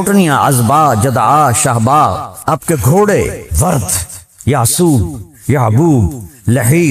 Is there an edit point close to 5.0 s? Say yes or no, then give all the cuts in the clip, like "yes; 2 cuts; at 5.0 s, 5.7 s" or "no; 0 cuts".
no; 2 cuts; at 2.3 s, 3.4 s